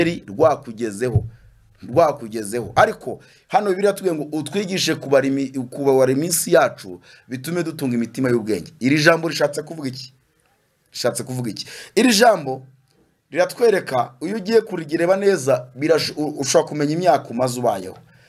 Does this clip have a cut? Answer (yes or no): no